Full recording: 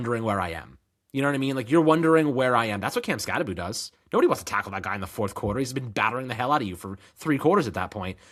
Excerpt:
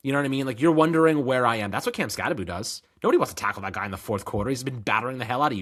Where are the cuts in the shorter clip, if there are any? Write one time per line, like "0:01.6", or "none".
none